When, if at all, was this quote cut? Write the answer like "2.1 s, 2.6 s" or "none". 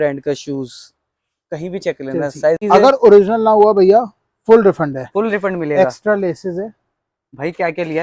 2.6 s